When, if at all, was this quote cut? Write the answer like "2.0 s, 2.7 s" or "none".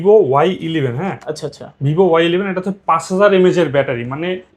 none